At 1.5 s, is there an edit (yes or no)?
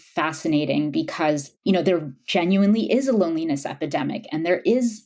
yes